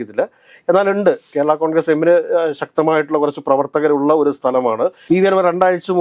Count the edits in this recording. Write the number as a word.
two